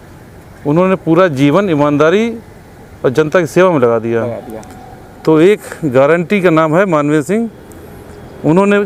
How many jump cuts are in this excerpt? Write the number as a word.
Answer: zero